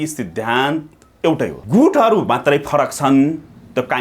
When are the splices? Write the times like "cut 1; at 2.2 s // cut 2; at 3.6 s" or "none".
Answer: cut 1; at 1.6 s